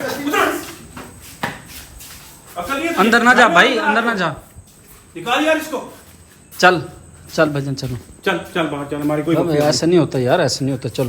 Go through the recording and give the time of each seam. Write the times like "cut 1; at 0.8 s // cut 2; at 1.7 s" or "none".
none